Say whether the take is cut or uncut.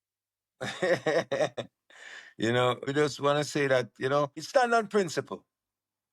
cut